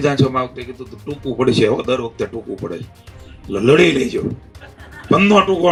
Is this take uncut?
yes; 0 cuts

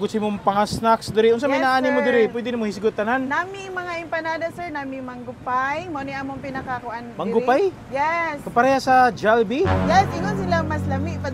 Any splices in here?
no; 0 cuts

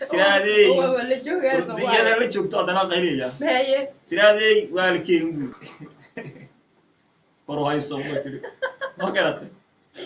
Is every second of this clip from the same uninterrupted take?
no; 1 cut; at 5.5 s

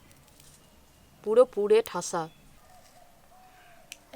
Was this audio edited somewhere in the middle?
yes; 1 cut; at 2.6 s

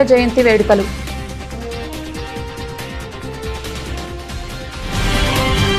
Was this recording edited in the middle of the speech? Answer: no; 0 cuts

